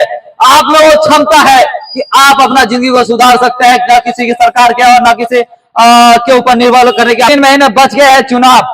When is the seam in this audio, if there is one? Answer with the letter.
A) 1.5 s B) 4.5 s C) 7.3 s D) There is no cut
C